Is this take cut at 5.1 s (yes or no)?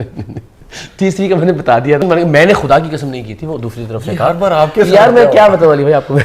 no